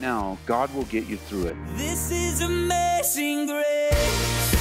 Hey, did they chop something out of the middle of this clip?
yes; 1 cut; at 1.4 s

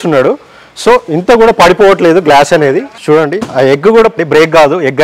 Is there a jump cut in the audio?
yes; 2 cuts; at 2.9 s, 4.1 s

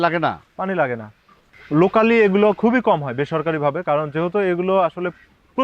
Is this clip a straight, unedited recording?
no; 1 cut; at 1.6 s

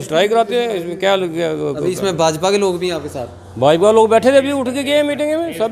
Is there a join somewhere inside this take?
no; 0 cuts

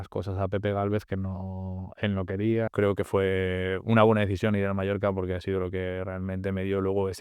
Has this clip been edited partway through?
yes; 1 cut; at 2.7 s

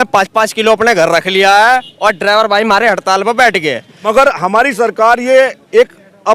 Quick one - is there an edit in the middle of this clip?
yes; 1 cut; at 3.9 s

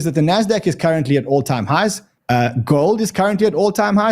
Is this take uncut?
no; 1 cut; at 2.1 s

